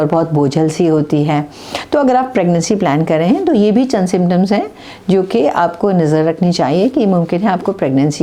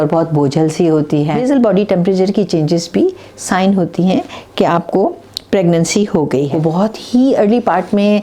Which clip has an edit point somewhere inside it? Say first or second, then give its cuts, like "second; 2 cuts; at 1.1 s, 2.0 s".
second; 2 cuts; at 1.4 s, 6.5 s